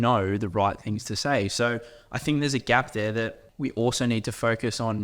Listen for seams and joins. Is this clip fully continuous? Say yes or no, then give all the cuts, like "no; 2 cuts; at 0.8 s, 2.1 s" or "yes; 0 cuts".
no; 1 cut; at 3.4 s